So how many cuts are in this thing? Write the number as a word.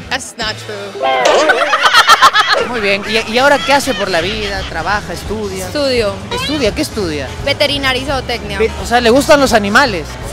one